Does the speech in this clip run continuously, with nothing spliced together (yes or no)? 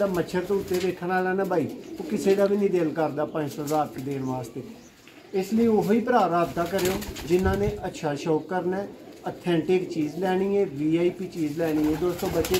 yes